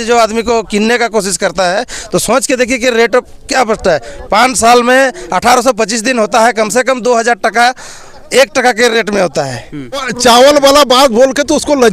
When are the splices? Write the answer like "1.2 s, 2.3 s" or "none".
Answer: 10.1 s